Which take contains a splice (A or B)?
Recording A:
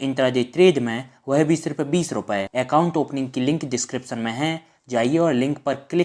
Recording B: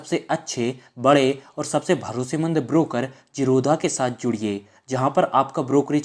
A